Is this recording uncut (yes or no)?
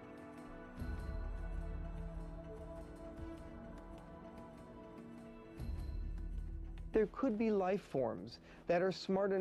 no